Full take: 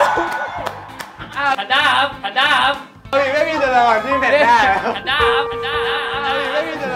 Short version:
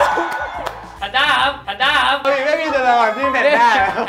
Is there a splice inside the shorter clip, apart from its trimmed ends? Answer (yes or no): yes